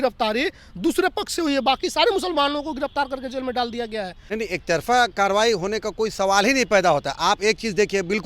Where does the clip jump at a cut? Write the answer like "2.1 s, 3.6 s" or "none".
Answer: 4.2 s